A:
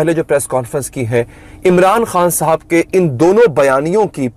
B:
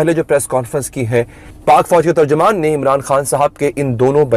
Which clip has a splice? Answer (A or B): B